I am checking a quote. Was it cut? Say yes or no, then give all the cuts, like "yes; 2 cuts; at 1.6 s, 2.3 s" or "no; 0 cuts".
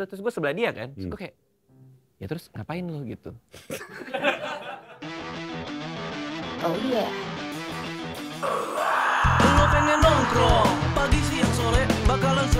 yes; 1 cut; at 5.4 s